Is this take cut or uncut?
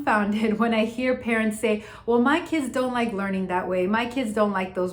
uncut